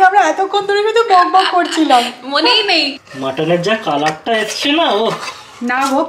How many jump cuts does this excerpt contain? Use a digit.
1